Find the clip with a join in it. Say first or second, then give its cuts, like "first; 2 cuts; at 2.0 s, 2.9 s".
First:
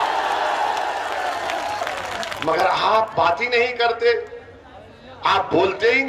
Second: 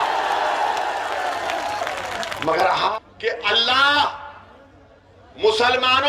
second; 1 cut; at 2.9 s